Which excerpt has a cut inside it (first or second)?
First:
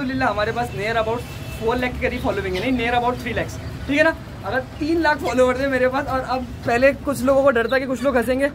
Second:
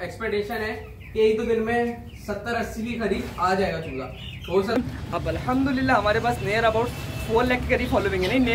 second